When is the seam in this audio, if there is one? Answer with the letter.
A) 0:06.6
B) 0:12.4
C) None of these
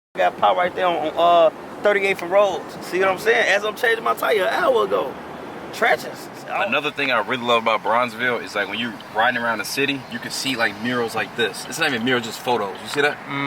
A